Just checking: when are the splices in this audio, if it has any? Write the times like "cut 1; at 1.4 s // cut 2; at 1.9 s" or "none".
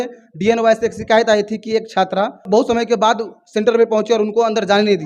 cut 1; at 2.5 s